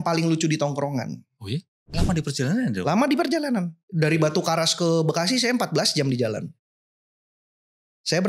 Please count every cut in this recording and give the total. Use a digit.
1